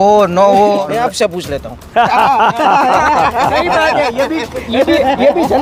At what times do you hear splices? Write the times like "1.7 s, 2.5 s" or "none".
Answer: 0.9 s